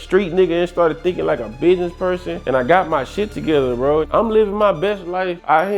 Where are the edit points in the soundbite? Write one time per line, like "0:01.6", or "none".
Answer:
0:04.1